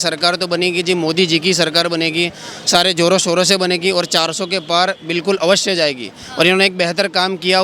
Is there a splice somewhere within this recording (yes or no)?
no